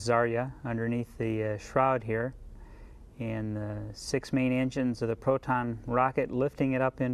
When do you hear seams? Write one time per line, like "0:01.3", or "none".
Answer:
none